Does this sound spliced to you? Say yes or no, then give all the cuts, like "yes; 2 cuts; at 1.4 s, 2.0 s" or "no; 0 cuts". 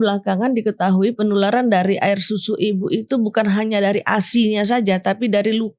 no; 0 cuts